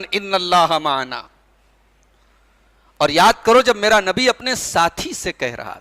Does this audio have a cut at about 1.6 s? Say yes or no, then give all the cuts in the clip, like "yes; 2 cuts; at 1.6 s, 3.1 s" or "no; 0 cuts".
no; 0 cuts